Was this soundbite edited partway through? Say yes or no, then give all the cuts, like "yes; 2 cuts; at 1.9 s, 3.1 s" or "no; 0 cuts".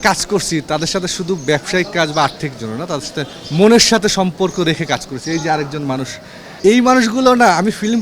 yes; 2 cuts; at 3.4 s, 6.1 s